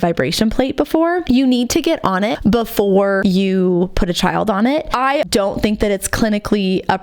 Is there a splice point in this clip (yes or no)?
yes